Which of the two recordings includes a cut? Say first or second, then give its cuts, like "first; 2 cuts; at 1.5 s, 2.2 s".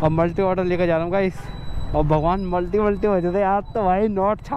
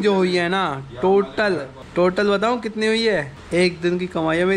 second; 1 cut; at 3.3 s